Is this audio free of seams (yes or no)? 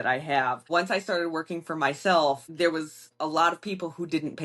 no